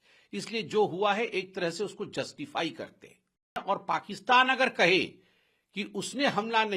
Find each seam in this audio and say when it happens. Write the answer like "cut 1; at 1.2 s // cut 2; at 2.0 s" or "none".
cut 1; at 3.6 s